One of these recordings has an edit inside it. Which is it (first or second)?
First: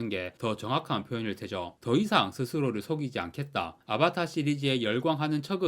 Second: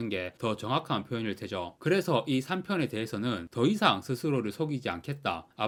first